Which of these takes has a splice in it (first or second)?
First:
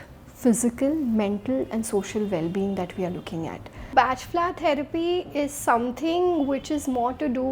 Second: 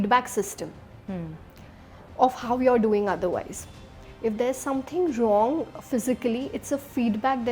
first